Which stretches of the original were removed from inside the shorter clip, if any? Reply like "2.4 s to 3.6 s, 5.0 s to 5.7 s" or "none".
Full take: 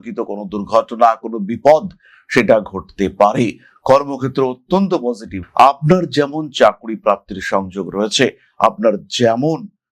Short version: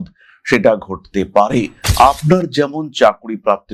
3.6 s to 5.4 s